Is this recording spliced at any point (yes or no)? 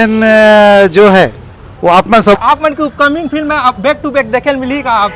yes